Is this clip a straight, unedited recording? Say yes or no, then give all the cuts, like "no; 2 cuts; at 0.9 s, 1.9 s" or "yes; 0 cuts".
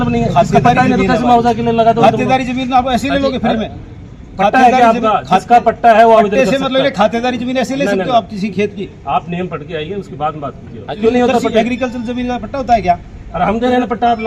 no; 1 cut; at 11.0 s